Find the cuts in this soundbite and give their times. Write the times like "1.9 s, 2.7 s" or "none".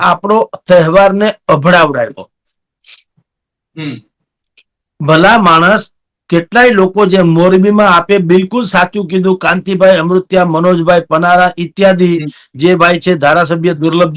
none